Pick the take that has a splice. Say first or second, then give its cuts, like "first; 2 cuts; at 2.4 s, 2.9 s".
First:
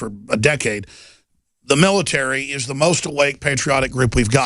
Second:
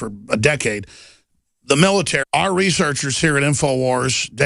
first; 1 cut; at 2.2 s